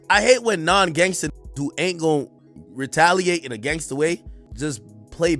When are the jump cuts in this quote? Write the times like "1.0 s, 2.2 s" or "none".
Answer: 4.4 s